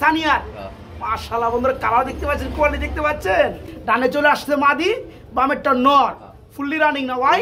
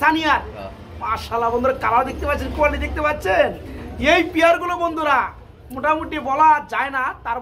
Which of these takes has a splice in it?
first; 1 cut; at 4.0 s

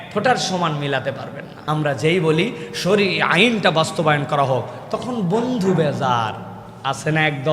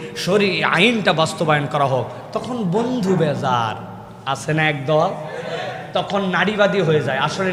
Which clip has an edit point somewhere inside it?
first; 1 cut; at 1.5 s

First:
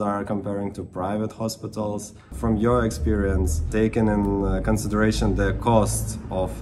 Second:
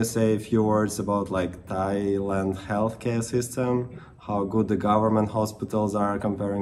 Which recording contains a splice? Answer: first; 2 cuts; at 2.3 s, 3.7 s

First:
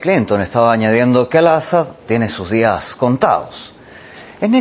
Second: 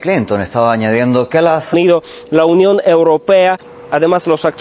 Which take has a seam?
first; 1 cut; at 1.7 s

